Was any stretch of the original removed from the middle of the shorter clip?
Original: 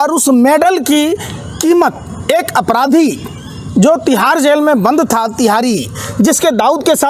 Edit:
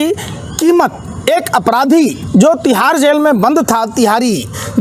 yes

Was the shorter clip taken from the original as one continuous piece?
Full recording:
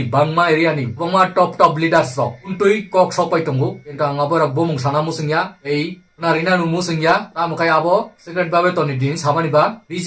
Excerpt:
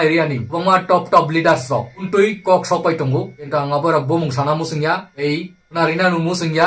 yes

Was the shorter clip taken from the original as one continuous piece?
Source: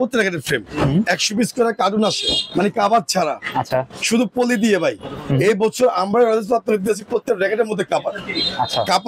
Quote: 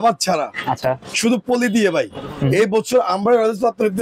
yes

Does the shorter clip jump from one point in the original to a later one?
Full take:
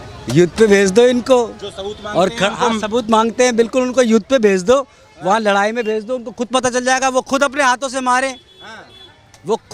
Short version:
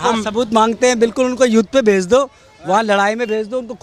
no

